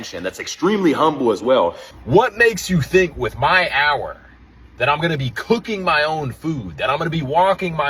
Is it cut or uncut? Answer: cut